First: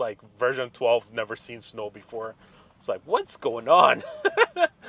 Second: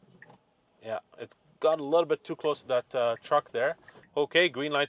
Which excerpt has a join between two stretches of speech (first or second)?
second